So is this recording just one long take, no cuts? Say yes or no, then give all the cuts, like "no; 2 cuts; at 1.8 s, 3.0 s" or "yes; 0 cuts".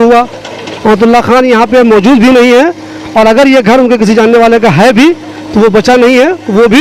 yes; 0 cuts